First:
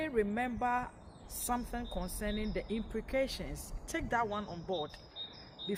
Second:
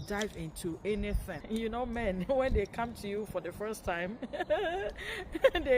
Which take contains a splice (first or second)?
second